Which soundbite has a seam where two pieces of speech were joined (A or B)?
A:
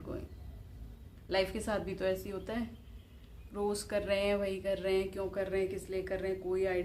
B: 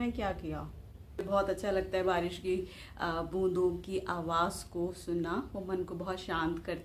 B